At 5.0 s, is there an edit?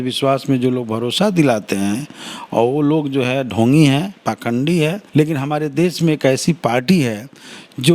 yes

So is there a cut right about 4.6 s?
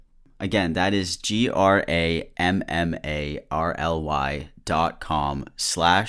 no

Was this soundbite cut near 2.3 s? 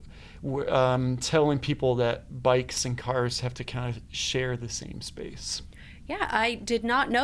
no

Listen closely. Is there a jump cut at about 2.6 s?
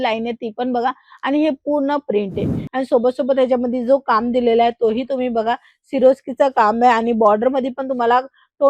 yes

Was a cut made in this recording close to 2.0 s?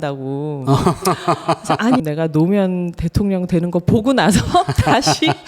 yes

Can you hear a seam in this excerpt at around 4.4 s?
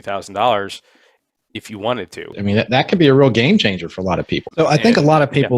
yes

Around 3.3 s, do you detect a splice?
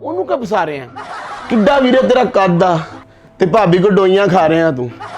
no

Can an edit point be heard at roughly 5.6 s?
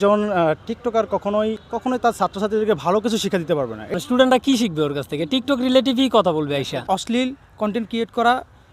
no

